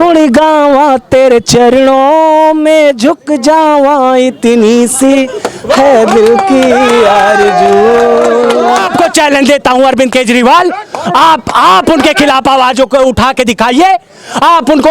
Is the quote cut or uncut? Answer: cut